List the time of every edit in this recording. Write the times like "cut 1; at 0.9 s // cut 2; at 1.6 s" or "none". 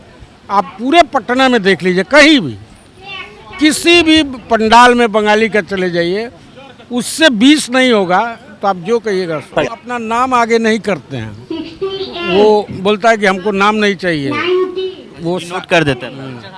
cut 1; at 9.9 s